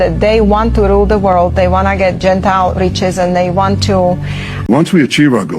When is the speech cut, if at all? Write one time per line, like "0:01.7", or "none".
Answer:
0:04.7